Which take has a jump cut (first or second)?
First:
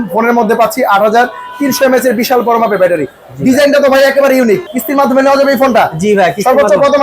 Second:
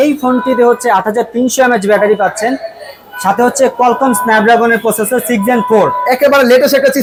first